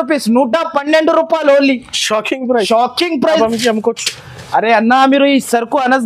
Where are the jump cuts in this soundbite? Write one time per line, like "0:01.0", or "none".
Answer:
0:03.4